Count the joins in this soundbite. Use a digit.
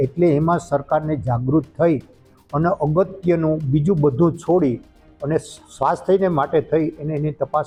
0